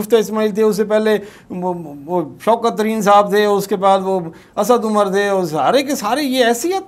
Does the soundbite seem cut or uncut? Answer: uncut